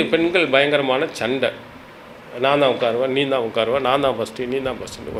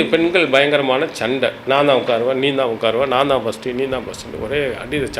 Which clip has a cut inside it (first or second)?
second